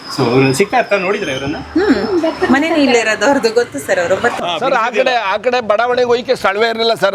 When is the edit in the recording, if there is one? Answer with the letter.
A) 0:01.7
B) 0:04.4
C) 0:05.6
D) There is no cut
B